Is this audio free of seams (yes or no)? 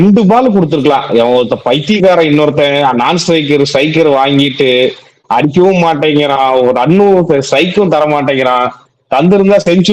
yes